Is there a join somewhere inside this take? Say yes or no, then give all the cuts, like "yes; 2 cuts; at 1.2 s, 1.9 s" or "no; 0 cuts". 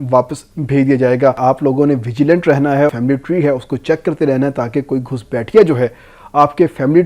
yes; 2 cuts; at 1.4 s, 2.9 s